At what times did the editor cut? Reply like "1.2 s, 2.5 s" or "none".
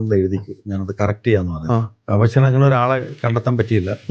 2.0 s